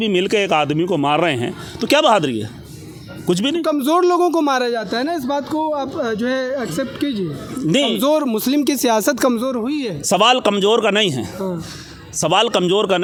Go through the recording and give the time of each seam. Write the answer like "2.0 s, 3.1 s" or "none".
none